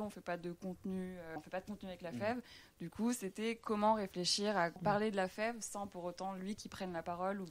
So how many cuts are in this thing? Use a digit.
2